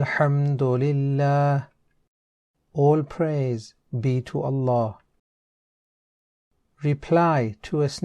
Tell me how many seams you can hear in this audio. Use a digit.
1